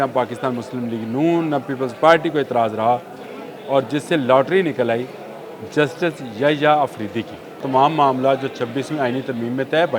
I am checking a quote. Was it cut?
yes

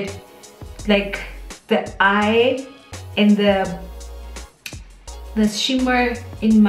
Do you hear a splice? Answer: yes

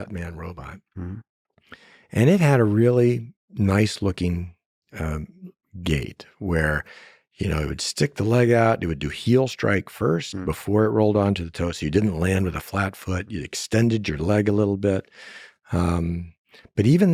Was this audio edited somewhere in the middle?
no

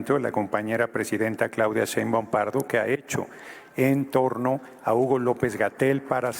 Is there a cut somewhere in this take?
no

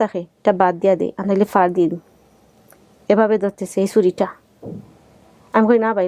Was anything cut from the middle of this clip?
no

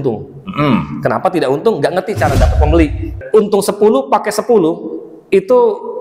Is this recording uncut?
no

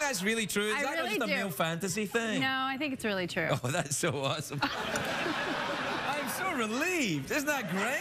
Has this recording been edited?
no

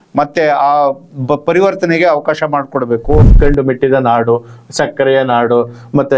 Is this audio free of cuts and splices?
no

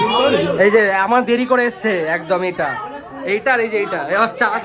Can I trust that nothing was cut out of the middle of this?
yes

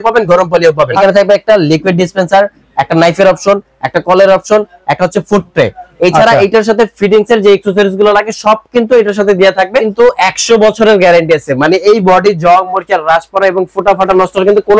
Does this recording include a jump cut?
yes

